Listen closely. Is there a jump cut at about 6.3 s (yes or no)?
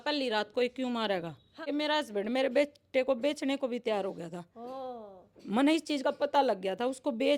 no